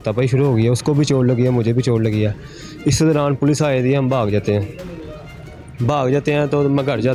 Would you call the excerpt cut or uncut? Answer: uncut